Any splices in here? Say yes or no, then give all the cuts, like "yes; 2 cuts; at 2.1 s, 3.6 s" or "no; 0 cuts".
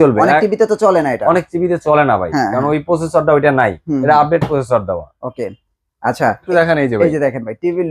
yes; 1 cut; at 6.5 s